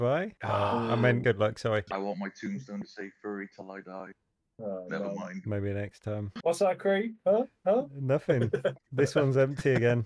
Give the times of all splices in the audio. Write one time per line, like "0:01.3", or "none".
0:01.9
0:06.3